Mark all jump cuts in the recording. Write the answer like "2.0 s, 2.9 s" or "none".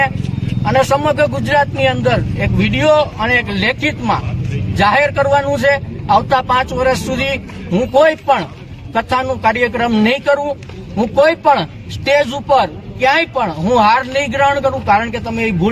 none